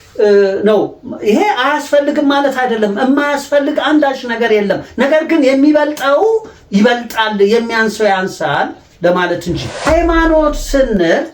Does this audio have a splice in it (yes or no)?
yes